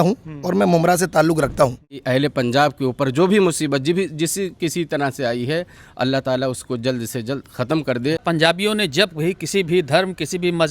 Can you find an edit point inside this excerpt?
yes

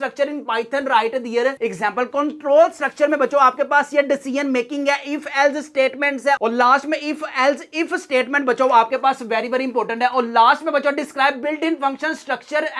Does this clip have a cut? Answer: no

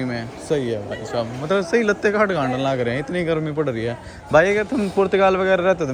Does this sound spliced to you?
no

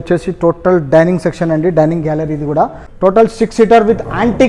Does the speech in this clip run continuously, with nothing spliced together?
no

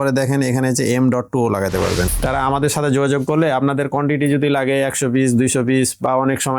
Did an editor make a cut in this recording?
yes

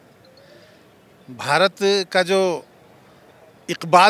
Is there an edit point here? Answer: no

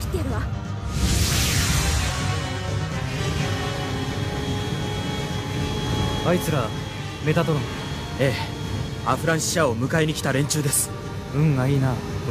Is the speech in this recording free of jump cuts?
no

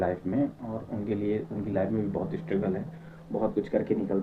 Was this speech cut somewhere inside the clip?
no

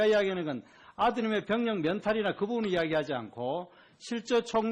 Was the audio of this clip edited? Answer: yes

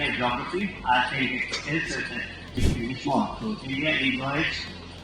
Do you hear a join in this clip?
yes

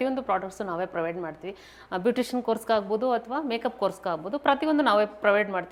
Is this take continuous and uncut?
yes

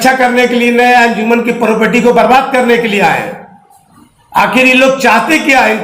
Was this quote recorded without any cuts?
yes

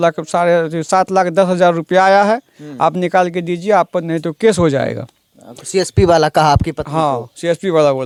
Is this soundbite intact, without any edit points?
yes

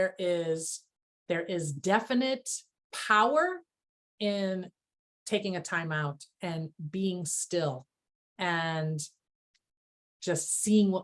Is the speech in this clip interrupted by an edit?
no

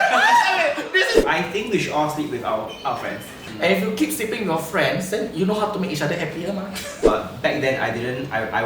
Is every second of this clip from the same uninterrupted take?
no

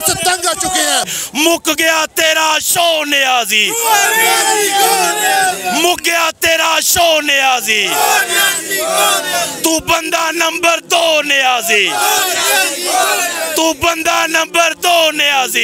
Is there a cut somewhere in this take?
yes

